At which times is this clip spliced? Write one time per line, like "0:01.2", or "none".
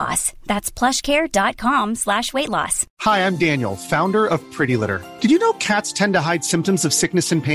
0:02.8